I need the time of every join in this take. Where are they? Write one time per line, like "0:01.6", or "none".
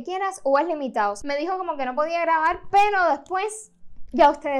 0:01.2